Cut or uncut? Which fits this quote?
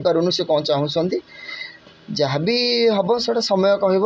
uncut